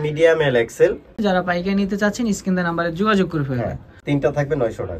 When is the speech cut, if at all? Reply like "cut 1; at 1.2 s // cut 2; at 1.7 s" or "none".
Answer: cut 1; at 1.2 s // cut 2; at 3.9 s